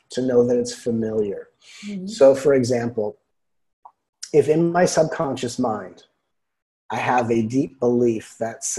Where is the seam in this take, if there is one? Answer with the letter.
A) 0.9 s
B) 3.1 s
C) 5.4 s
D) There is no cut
D